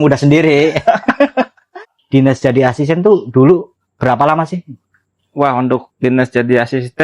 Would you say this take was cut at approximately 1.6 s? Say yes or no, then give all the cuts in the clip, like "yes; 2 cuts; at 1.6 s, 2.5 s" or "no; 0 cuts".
yes; 1 cut; at 1.6 s